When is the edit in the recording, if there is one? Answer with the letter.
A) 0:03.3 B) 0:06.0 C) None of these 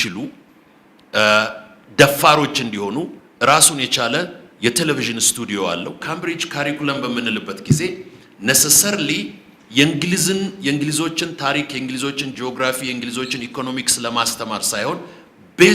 B